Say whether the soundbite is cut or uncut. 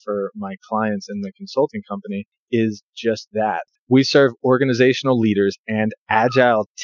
cut